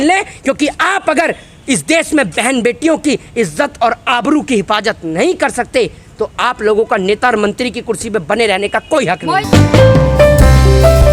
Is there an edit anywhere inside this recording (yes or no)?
no